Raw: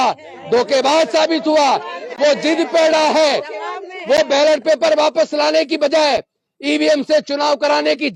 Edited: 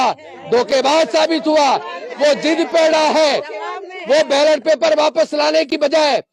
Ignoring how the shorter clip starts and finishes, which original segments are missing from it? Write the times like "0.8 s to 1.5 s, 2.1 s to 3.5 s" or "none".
none